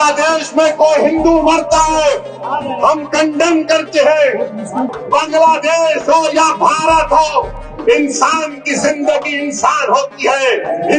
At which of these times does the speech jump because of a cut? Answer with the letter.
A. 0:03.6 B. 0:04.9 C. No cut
B